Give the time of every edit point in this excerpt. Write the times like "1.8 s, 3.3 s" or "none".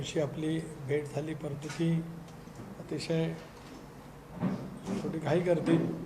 none